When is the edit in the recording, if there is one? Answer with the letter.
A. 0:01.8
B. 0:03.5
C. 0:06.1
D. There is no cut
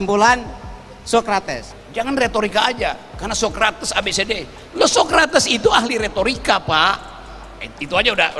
A